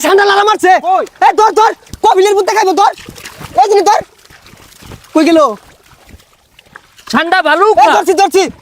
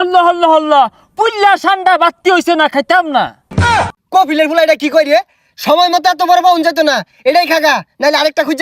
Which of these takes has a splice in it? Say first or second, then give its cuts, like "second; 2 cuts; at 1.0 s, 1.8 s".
second; 1 cut; at 3.6 s